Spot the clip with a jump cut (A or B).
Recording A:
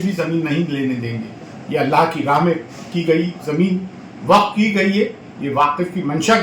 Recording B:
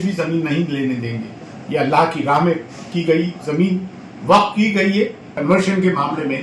B